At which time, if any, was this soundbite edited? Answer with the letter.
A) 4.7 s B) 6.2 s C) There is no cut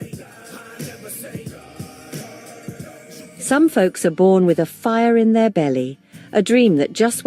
A